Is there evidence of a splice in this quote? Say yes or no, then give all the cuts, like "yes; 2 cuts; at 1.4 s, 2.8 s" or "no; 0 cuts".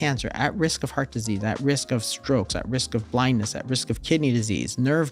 no; 0 cuts